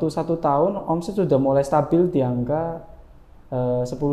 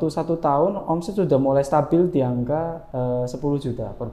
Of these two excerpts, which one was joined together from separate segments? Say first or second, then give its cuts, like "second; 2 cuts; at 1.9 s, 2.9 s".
second; 1 cut; at 2.8 s